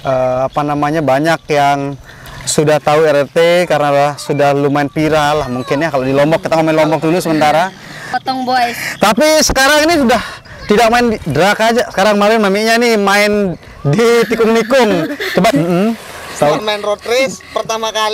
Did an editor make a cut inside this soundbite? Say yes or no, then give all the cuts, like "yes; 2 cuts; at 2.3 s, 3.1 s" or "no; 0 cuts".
yes; 2 cuts; at 8.1 s, 15.5 s